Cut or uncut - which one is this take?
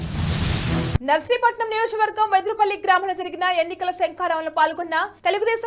cut